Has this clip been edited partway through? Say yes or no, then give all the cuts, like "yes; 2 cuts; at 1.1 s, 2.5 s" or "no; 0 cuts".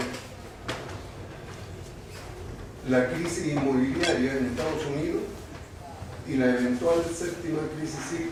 no; 0 cuts